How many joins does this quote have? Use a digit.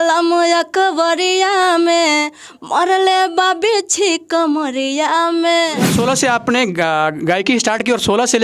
1